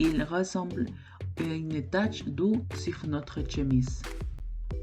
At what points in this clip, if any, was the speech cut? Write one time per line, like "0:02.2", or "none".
0:03.9